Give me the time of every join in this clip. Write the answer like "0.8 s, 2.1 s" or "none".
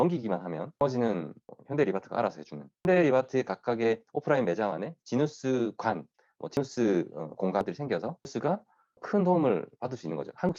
2.8 s, 7.6 s